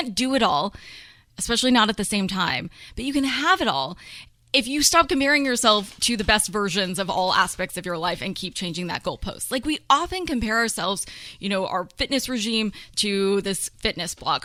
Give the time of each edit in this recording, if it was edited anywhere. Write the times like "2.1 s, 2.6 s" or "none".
none